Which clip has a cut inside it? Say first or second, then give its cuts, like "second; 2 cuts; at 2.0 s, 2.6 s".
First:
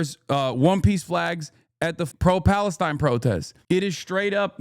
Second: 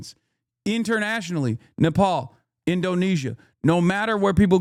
first; 2 cuts; at 2.1 s, 3.5 s